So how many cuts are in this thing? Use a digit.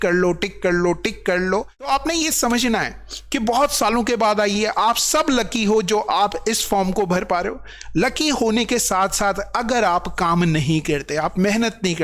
1